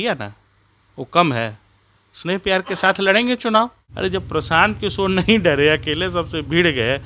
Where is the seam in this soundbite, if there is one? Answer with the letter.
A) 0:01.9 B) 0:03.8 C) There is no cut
B